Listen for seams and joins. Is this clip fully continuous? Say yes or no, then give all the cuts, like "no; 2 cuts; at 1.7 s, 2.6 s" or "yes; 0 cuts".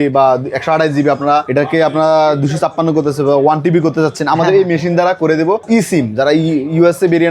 no; 1 cut; at 5.6 s